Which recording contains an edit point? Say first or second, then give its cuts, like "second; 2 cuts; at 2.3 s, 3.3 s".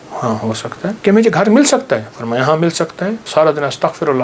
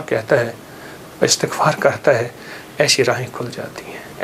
first; 2 cuts; at 1.0 s, 3.2 s